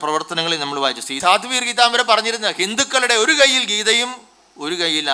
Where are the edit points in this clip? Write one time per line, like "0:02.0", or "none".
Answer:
0:01.2